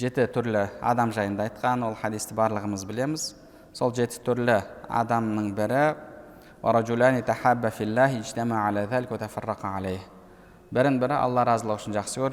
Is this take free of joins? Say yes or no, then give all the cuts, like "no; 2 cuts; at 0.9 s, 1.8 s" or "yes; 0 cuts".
yes; 0 cuts